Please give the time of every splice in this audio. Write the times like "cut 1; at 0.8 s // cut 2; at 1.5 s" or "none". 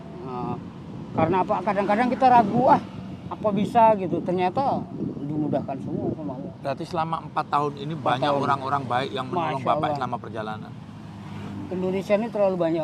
none

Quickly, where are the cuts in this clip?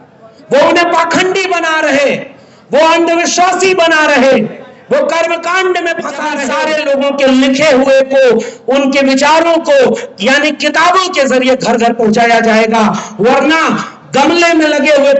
cut 1; at 6.4 s

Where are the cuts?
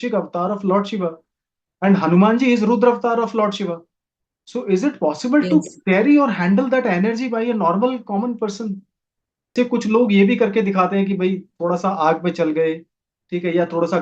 cut 1; at 9.5 s

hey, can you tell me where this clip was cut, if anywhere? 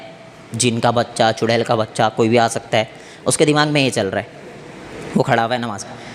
none

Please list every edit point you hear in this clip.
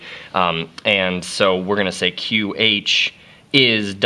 cut 1; at 1.8 s

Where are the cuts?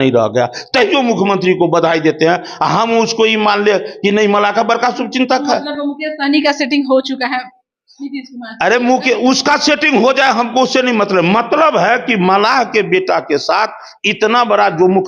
none

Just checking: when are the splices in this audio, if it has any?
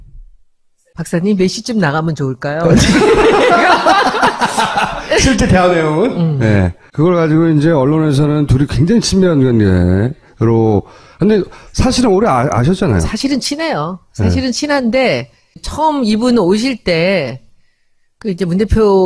cut 1; at 11.5 s

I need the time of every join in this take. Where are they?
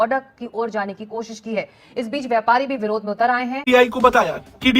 cut 1; at 3.6 s

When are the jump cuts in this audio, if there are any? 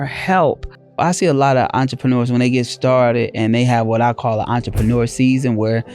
cut 1; at 1.0 s

